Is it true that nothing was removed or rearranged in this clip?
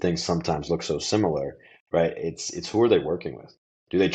yes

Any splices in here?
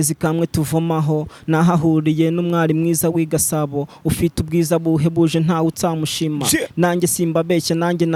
no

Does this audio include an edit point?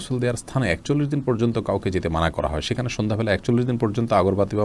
no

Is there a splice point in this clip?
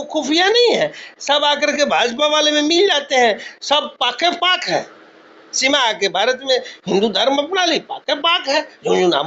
no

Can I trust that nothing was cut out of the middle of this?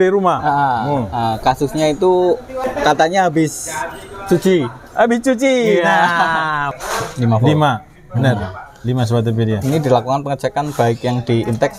no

